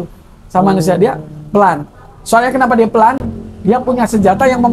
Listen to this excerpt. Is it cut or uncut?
uncut